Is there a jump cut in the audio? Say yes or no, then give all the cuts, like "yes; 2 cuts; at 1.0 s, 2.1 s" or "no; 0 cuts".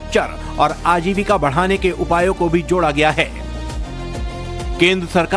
no; 0 cuts